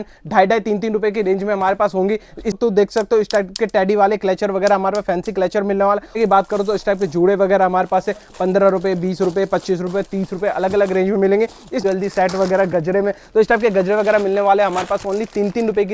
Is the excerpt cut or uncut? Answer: cut